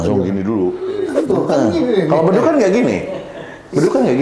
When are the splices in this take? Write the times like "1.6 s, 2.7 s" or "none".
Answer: 1.0 s